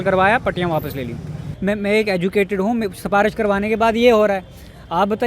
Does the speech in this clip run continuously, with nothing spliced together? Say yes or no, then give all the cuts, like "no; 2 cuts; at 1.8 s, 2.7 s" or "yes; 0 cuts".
no; 1 cut; at 1.5 s